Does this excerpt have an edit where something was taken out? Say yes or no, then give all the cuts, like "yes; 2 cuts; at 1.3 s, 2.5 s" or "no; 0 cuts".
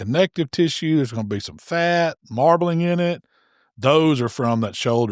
no; 0 cuts